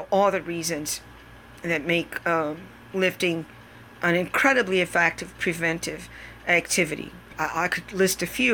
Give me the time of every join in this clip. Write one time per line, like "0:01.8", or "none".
none